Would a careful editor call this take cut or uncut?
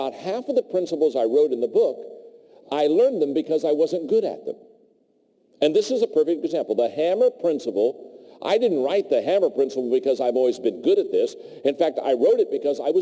cut